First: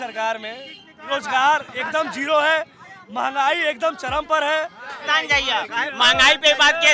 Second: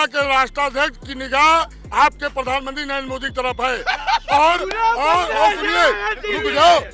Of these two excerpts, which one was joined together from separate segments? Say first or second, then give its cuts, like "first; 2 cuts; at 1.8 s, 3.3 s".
first; 2 cuts; at 0.9 s, 4.8 s